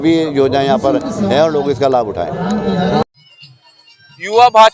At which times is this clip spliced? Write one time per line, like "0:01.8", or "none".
none